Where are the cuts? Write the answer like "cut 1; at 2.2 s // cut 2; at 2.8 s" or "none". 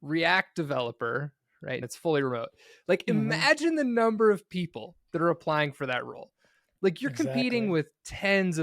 cut 1; at 1.8 s